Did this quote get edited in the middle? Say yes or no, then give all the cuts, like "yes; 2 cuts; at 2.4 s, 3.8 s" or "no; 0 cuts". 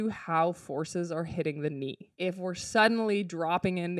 yes; 1 cut; at 2.0 s